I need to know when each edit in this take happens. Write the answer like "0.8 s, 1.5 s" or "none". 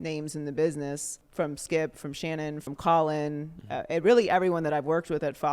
1.2 s, 2.6 s